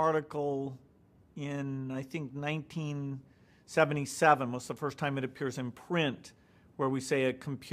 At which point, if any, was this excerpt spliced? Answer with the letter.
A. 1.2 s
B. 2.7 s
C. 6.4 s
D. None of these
B